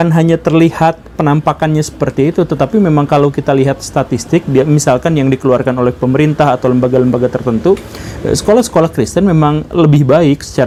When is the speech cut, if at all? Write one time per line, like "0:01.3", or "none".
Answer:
none

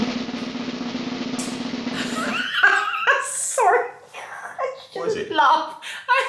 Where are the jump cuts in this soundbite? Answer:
none

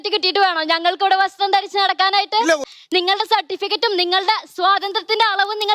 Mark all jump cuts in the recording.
0:02.6

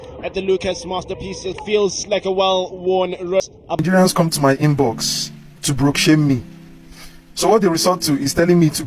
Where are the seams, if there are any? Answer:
0:03.8

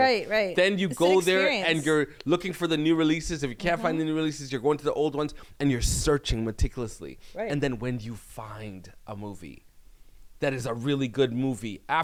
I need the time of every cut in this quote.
none

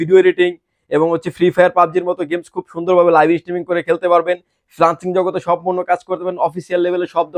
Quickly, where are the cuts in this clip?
none

